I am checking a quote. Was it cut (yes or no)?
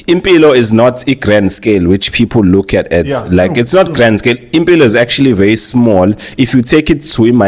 no